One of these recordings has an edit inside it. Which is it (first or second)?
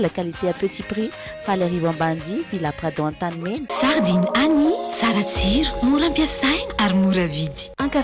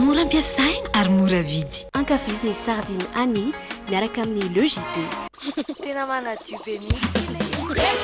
first